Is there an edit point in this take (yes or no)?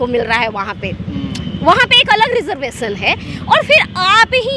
no